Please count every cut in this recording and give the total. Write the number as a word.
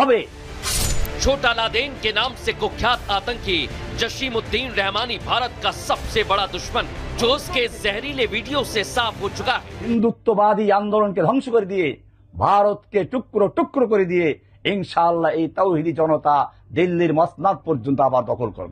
one